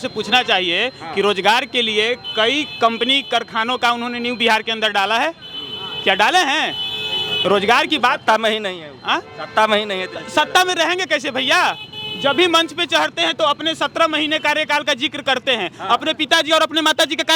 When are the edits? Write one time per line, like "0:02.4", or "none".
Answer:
none